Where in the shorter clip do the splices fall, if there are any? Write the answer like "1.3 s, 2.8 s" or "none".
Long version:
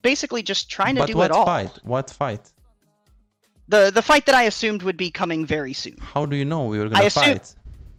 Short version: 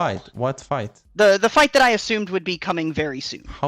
1.0 s